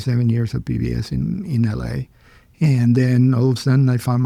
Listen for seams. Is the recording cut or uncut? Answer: uncut